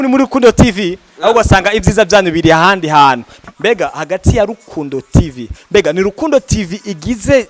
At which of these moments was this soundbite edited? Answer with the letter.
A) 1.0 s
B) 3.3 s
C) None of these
B